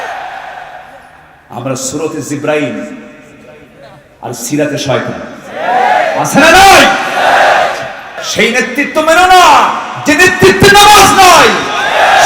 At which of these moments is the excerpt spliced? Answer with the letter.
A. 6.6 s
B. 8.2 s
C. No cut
B